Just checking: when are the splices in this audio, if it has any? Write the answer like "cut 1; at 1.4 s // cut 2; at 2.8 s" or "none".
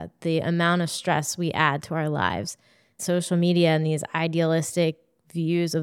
cut 1; at 3.0 s